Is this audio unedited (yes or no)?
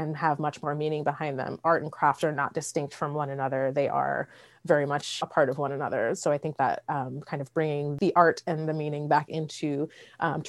no